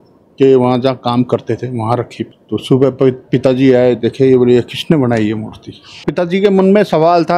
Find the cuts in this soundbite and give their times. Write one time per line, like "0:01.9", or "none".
0:02.4
0:06.1